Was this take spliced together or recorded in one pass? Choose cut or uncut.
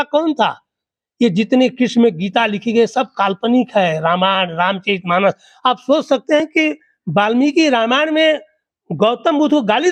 uncut